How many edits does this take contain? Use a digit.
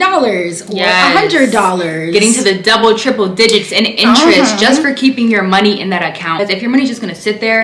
1